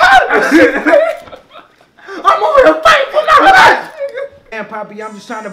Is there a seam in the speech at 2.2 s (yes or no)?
no